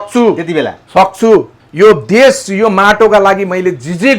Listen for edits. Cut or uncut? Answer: cut